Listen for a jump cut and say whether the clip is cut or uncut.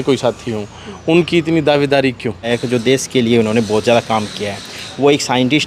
cut